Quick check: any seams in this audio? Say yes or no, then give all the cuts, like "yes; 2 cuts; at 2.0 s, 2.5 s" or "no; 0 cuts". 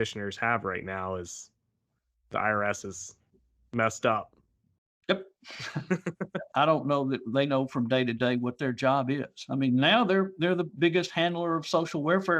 yes; 1 cut; at 6.5 s